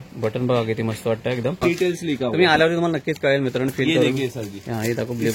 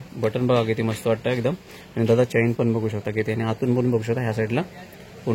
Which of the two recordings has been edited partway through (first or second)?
first